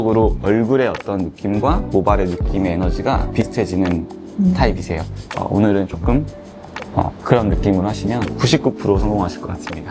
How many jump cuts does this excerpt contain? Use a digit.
1